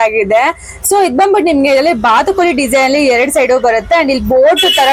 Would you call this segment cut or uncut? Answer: uncut